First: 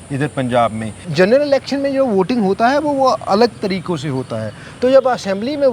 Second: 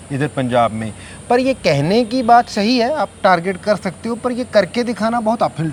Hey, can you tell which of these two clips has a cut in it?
first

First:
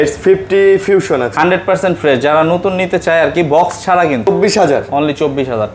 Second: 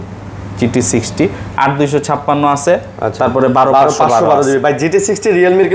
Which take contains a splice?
first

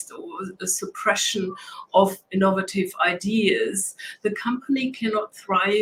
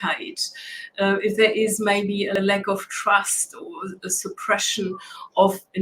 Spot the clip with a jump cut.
second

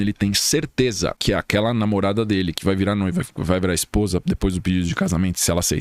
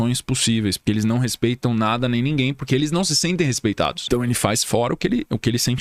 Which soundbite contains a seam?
second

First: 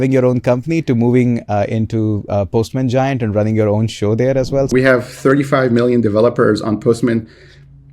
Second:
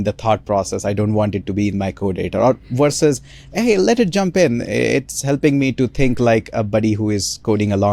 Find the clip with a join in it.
first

